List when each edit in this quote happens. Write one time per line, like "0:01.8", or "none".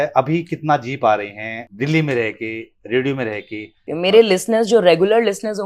0:01.6
0:03.8